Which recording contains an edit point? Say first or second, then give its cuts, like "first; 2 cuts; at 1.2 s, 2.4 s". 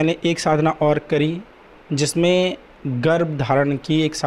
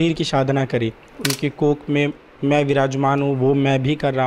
second; 1 cut; at 1.2 s